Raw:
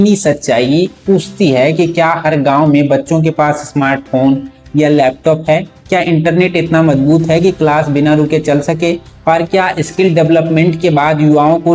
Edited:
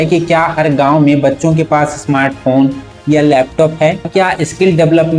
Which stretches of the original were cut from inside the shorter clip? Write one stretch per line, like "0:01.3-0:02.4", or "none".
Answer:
0:05.8-0:09.5